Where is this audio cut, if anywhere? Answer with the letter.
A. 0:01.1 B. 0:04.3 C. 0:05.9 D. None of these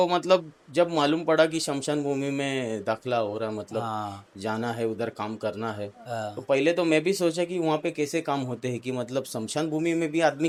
D